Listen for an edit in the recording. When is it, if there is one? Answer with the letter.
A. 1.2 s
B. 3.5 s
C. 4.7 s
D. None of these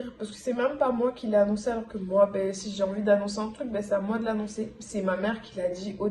D